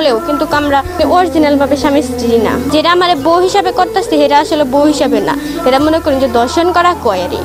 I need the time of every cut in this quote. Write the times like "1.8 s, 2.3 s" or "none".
none